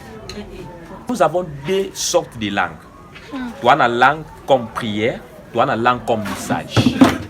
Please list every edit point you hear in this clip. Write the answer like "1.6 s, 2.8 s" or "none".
1.1 s